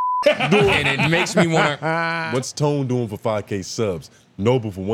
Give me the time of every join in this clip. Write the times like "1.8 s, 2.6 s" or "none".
2.2 s